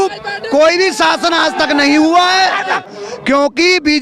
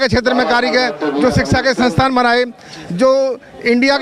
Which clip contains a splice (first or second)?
first